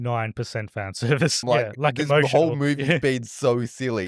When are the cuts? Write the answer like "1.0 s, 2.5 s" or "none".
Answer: 1.4 s